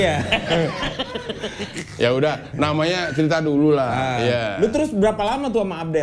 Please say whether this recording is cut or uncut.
uncut